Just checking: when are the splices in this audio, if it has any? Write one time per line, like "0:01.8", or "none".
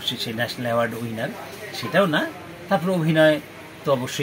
none

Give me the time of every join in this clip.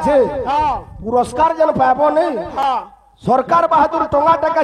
0:02.6

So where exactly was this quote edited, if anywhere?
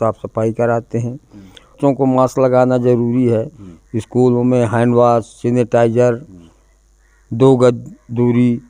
0:01.8

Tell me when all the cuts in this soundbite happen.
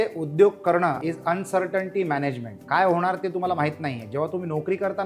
0:01.0
0:02.5

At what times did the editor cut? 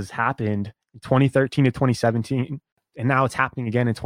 0:02.8

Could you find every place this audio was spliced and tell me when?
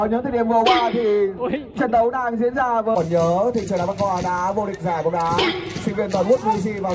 0:02.9

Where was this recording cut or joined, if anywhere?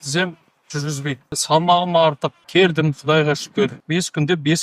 0:01.4
0:02.4
0:03.8

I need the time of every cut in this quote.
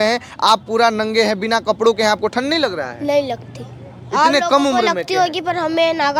none

